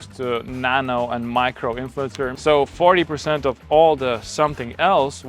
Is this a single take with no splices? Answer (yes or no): no